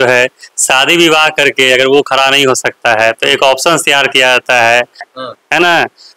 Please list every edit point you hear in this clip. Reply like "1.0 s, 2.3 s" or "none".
5.0 s